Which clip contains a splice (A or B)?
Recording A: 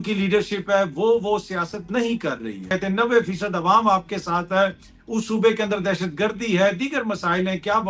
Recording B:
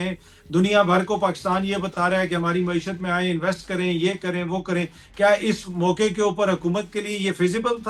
A